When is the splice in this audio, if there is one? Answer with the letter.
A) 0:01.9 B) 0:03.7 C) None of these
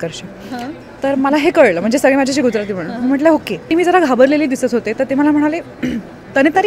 B